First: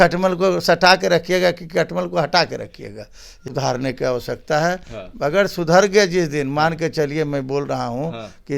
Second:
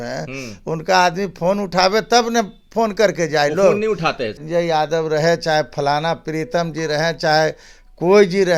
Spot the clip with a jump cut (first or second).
first